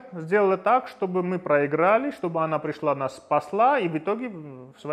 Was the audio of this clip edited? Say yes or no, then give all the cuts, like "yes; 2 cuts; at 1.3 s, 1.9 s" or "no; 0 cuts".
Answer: no; 0 cuts